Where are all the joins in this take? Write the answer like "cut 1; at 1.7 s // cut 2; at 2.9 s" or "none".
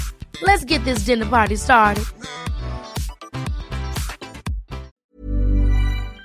cut 1; at 5.0 s